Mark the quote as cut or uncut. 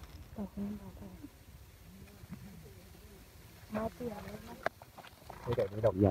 uncut